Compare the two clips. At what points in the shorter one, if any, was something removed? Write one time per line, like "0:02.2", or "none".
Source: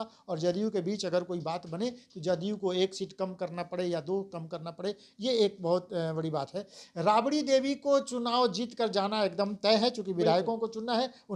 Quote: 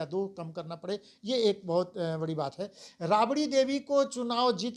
none

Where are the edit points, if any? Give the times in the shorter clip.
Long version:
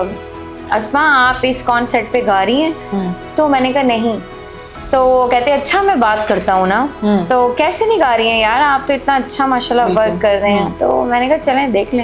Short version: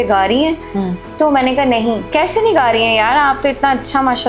0:02.1

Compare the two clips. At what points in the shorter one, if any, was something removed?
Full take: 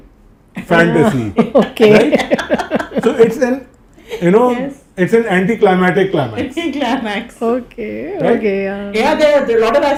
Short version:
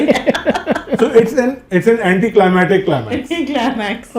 0:01.6

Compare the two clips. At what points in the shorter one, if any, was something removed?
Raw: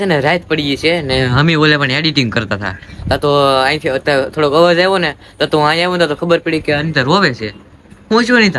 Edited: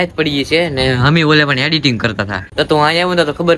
0:02.4

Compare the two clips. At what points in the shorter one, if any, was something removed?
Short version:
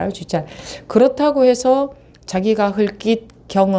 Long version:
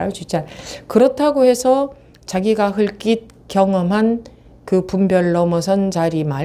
none

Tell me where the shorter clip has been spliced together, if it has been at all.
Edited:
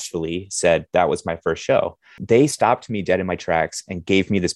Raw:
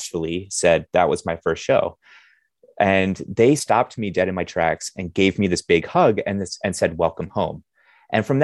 0:02.2

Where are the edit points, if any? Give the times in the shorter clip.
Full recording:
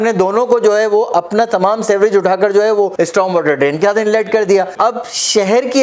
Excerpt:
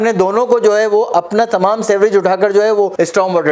none

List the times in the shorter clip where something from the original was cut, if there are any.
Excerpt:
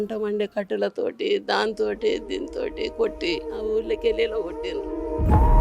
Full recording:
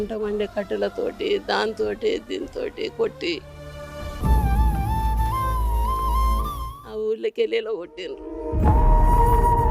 0:03.5

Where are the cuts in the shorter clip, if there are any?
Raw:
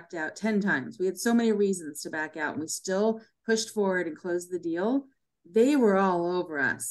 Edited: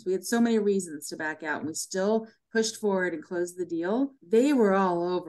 0:04.2

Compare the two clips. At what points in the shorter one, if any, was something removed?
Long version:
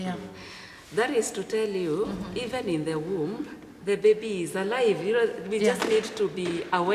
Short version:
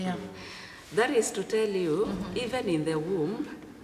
none

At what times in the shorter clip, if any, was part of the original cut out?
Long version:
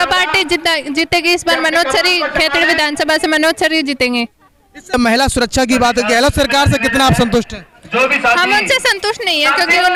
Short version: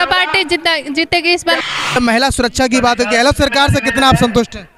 0:01.6

